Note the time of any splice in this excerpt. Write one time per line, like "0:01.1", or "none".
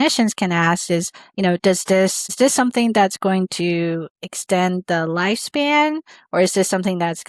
none